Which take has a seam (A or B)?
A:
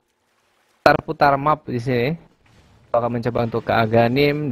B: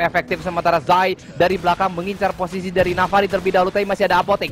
B